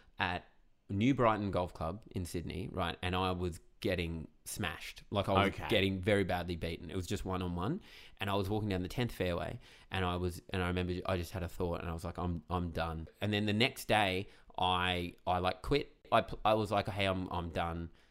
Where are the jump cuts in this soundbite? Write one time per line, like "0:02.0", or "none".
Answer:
0:13.1
0:16.0

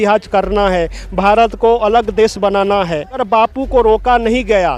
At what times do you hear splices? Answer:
0:03.2

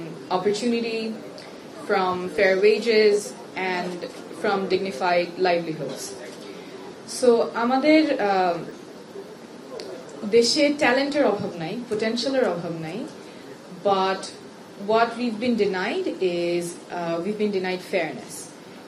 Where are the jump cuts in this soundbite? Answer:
none

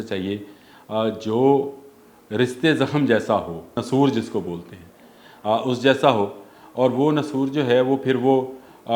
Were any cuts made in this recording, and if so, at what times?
0:03.8

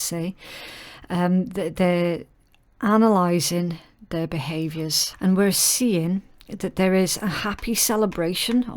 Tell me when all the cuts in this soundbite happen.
0:05.0

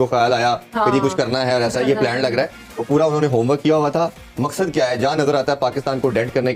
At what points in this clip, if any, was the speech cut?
none

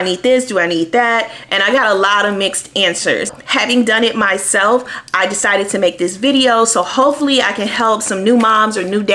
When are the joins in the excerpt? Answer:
0:03.4

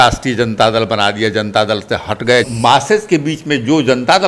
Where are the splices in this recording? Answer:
0:02.5

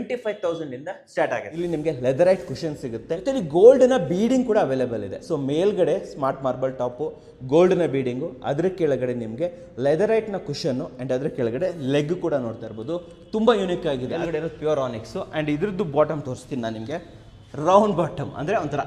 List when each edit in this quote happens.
0:01.5
0:03.1
0:14.1

